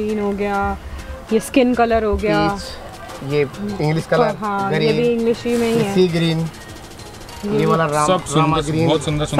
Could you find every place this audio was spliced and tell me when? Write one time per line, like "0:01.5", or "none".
none